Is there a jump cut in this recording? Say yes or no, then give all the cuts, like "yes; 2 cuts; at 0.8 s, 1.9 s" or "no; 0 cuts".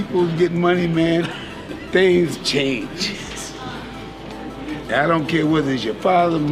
no; 0 cuts